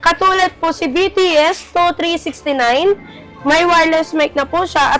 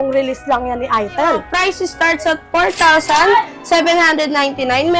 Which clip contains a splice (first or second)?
second